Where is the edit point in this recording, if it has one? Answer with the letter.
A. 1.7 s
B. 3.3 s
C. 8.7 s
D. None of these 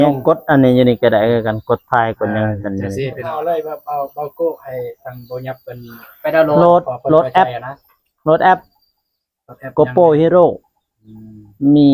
B